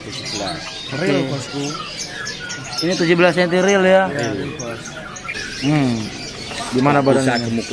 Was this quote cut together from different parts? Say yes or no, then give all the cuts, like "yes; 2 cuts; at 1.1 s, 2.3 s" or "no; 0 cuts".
yes; 1 cut; at 5.4 s